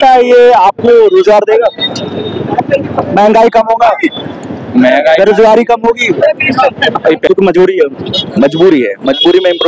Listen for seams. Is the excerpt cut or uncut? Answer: cut